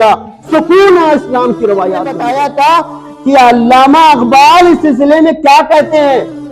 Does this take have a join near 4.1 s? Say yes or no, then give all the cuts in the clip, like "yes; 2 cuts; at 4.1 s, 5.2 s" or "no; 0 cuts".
no; 1 cut; at 2.2 s